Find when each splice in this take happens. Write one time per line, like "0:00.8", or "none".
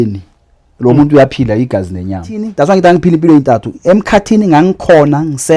0:02.5